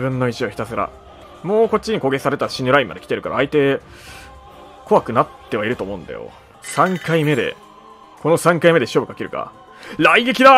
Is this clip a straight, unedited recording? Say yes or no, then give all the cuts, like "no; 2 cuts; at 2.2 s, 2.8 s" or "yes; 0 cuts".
yes; 0 cuts